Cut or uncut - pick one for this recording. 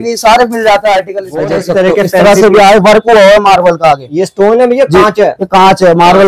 cut